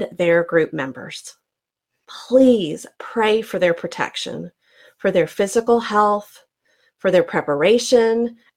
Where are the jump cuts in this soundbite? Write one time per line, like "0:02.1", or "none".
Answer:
0:02.0